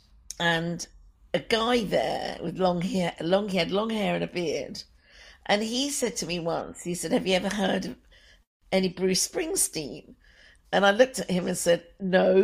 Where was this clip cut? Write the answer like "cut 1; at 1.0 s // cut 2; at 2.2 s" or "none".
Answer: none